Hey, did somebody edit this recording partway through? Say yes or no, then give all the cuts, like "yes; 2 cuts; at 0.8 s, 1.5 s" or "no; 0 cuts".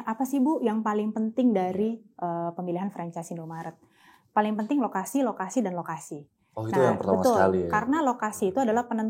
no; 0 cuts